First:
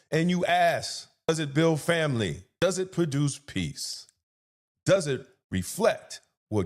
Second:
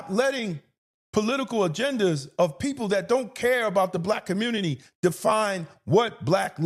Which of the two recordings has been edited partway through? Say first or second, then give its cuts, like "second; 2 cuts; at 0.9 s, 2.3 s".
first; 2 cuts; at 1.3 s, 2.5 s